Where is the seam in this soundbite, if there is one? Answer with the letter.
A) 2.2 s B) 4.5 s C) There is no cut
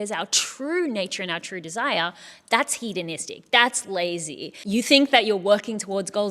B